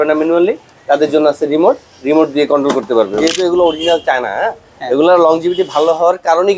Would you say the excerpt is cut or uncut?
cut